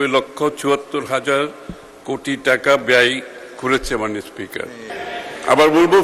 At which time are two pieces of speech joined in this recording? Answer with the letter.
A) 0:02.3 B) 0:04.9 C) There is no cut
B